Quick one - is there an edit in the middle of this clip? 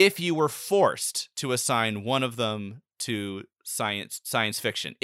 no; 0 cuts

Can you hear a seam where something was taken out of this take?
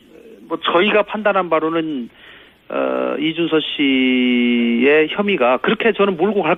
no; 0 cuts

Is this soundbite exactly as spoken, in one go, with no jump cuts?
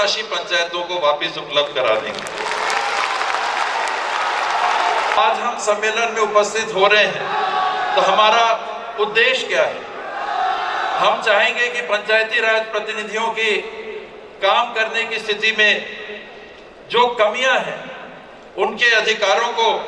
yes; 0 cuts

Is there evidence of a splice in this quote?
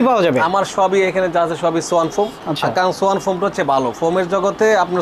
no; 0 cuts

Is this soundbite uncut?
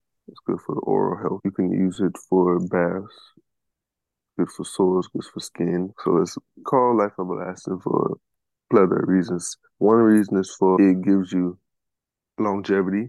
no; 3 cuts; at 1.4 s, 5.9 s, 10.8 s

